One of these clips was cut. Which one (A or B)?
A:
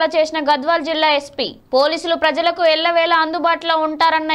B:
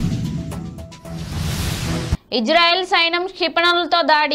B